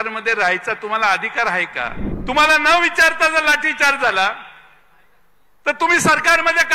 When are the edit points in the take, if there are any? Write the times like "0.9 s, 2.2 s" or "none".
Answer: 2.1 s